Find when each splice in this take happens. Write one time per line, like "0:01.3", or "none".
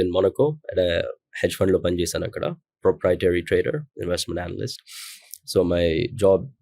none